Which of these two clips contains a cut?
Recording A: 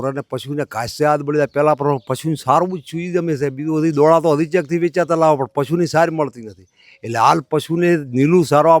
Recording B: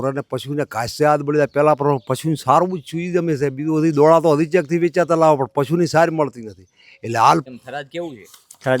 B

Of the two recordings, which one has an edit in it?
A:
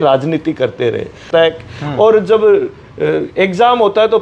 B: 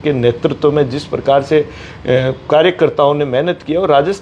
A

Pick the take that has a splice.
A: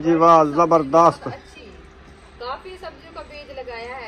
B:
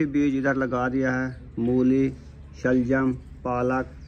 A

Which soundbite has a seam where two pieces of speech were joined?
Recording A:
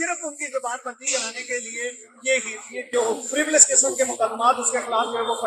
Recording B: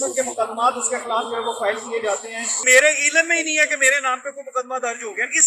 B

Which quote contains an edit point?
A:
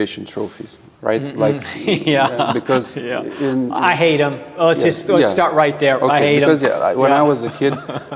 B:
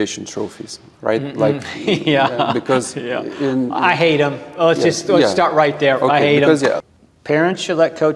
B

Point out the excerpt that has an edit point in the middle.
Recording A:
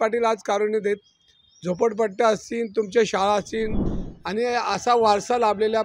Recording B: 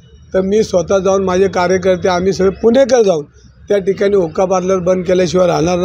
A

